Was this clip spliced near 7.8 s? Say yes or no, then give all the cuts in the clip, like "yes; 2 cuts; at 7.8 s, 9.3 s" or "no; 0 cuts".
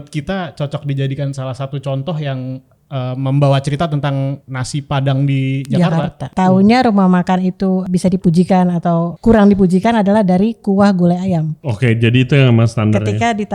yes; 5 cuts; at 4.5 s, 6.3 s, 7.8 s, 9.1 s, 11.6 s